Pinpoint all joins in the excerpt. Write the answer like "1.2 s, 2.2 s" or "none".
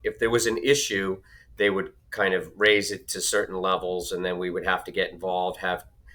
none

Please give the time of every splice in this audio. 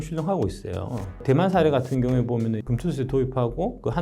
1.1 s, 2.6 s

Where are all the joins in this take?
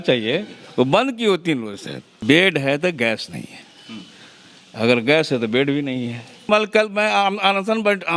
2.2 s, 6.5 s

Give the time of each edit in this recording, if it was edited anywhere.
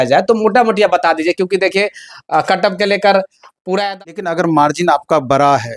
3.9 s

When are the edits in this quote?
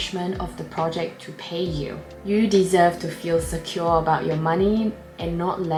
none

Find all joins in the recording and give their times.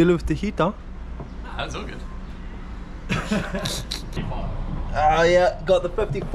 none

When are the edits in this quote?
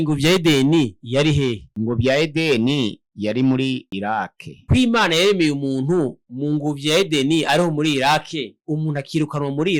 1.0 s, 4.5 s

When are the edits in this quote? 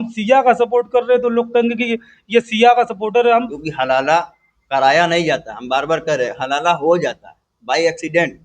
3.5 s

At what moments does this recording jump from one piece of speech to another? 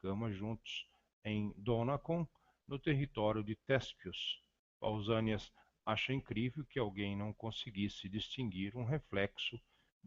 6.0 s

